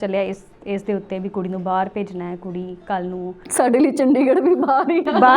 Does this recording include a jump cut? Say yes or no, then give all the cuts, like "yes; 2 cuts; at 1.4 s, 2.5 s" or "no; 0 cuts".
no; 0 cuts